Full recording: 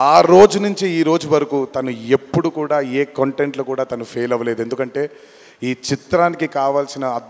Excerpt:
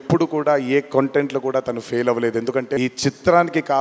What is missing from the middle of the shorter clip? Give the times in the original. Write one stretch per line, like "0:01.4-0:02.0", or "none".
0:05.0-0:05.6